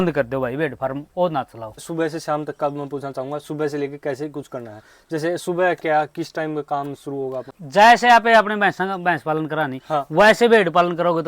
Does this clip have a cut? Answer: yes; 2 cuts; at 1.8 s, 7.6 s

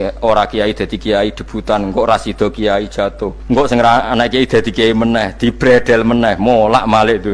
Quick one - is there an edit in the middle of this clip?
yes; 1 cut; at 3.3 s

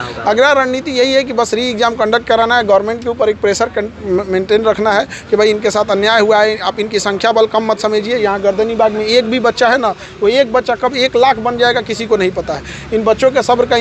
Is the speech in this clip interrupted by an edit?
no; 0 cuts

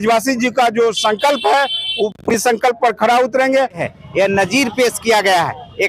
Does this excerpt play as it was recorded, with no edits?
no; 1 cut; at 3.8 s

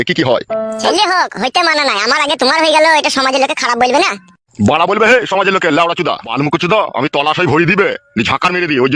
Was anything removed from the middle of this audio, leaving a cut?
yes; 2 cuts; at 0.9 s, 6.3 s

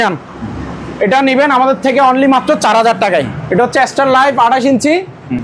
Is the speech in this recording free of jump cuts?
no; 1 cut; at 3.4 s

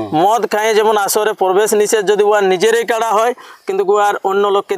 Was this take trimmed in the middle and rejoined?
no; 0 cuts

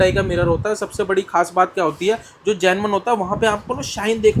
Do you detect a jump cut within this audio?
no; 0 cuts

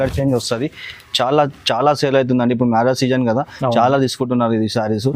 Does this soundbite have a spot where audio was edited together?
no; 0 cuts

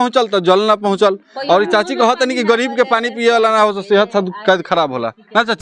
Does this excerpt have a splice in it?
no; 0 cuts

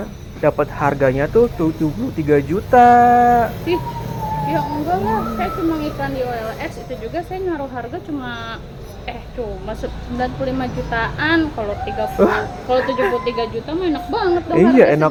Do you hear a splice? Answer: no; 0 cuts

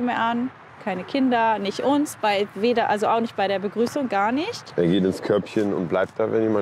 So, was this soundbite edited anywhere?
no; 0 cuts

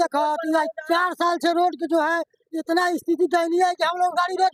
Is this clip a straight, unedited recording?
yes; 0 cuts

